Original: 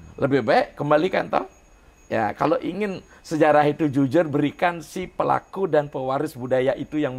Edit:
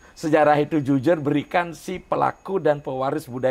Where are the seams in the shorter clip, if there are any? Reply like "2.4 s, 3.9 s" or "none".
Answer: none